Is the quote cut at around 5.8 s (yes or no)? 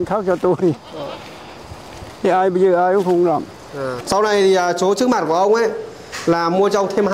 no